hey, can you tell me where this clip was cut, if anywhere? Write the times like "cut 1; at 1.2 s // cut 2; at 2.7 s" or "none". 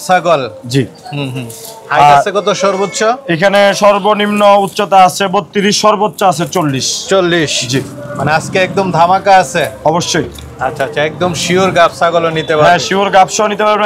none